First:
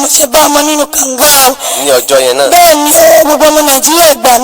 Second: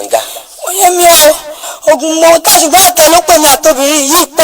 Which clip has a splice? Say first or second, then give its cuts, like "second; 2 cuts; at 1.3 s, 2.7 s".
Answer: second; 1 cut; at 1.5 s